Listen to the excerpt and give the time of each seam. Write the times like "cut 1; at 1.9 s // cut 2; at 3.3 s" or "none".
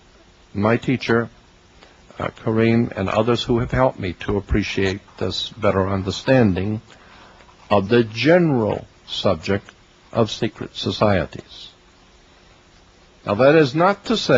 cut 1; at 7.9 s